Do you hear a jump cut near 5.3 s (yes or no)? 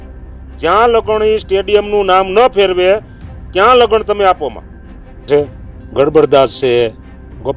yes